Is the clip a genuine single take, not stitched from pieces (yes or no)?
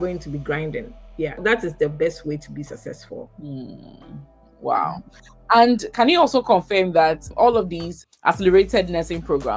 no